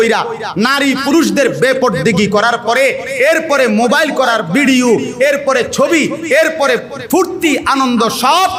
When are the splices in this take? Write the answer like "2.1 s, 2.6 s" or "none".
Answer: none